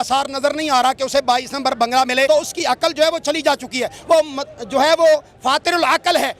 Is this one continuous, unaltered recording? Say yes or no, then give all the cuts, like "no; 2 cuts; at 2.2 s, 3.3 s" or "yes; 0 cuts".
no; 1 cut; at 2.3 s